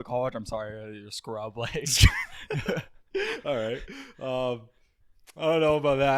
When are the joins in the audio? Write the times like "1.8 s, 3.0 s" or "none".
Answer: none